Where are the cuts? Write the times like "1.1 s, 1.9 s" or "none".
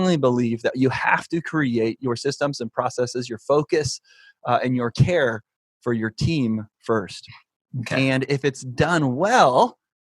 none

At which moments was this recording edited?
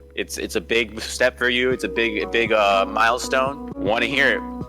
3.7 s

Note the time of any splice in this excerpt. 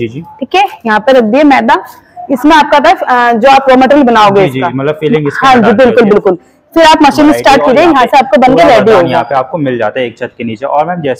9.1 s

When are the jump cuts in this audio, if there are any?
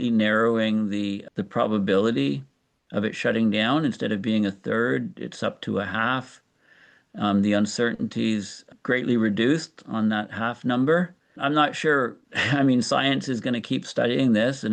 none

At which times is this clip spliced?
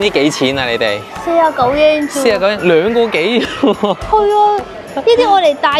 none

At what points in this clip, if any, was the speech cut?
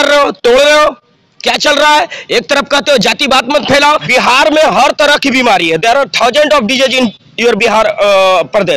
4.0 s

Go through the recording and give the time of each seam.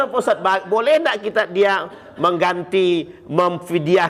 none

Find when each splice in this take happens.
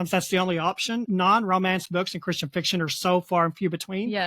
1.0 s

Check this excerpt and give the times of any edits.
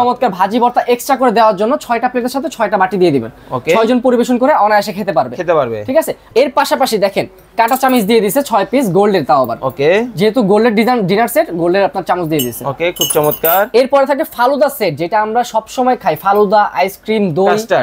6.2 s

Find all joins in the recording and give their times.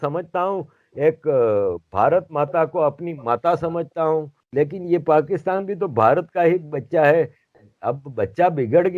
4.4 s

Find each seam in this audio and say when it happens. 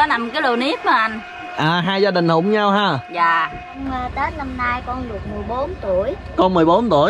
3.8 s

